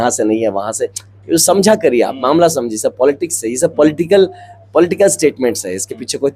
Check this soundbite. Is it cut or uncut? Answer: uncut